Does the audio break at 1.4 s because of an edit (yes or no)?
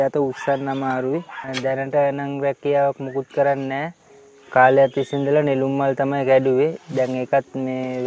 yes